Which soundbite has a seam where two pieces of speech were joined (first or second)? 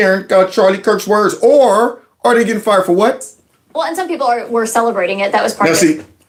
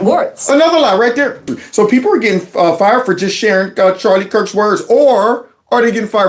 second